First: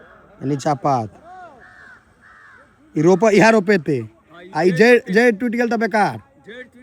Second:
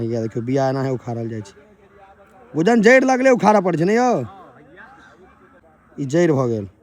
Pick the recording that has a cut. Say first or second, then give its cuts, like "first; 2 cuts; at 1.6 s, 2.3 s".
second; 1 cut; at 5.6 s